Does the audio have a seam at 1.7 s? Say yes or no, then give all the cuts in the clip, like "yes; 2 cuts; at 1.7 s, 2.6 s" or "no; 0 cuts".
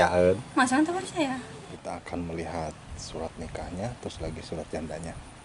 yes; 1 cut; at 1.7 s